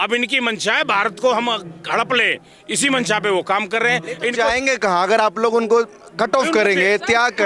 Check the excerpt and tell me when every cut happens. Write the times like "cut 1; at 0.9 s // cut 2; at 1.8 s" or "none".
none